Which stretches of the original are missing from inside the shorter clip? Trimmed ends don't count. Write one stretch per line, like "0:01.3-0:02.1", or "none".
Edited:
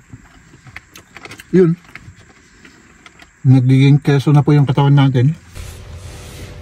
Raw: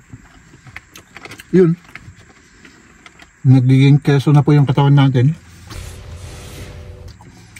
0:05.6-0:05.8